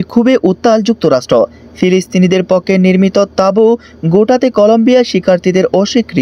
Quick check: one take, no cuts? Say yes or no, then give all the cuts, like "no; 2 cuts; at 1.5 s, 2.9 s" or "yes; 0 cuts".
yes; 0 cuts